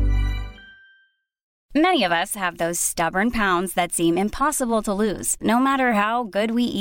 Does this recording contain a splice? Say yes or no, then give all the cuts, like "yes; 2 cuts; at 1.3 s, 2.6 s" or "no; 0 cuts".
yes; 1 cut; at 1.5 s